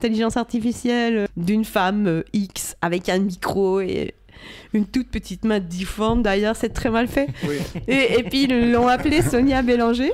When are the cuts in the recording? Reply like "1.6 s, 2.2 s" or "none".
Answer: 1.3 s